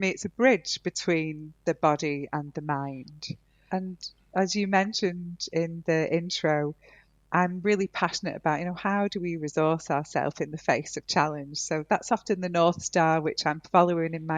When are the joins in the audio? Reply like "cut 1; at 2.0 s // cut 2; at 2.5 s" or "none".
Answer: none